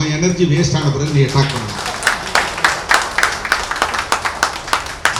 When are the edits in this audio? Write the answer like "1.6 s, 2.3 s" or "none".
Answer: none